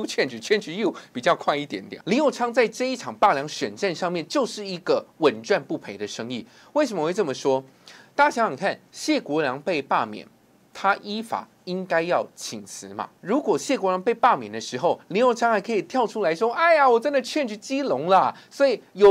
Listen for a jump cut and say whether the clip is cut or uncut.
cut